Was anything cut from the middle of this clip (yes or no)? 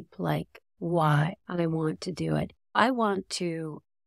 yes